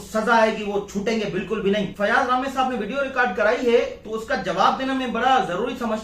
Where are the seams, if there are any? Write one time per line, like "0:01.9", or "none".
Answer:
0:01.9